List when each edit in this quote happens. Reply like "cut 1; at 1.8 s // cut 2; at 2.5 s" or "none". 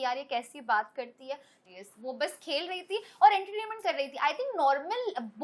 cut 1; at 1.5 s